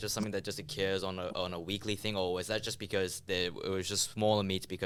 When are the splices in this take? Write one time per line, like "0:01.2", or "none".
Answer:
none